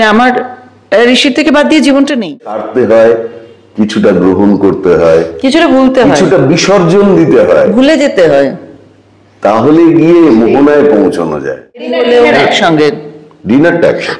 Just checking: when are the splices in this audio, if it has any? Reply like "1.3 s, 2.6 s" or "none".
2.7 s, 11.9 s